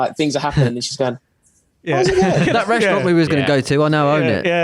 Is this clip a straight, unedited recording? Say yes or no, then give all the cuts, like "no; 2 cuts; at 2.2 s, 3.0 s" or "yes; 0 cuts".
no; 1 cut; at 2.5 s